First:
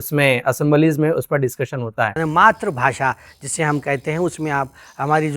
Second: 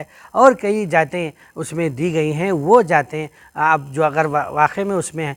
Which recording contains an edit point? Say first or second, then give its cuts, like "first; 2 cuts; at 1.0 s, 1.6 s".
first; 1 cut; at 2.2 s